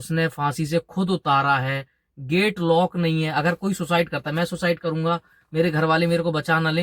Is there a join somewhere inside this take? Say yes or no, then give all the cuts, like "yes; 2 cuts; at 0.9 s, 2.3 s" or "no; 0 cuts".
no; 0 cuts